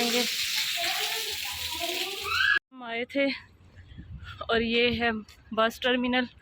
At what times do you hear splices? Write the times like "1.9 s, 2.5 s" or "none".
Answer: 2.5 s